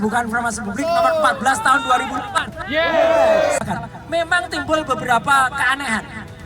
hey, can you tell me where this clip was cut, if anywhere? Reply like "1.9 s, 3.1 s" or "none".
3.6 s